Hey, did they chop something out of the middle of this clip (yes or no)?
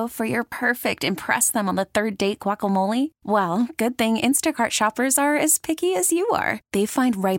no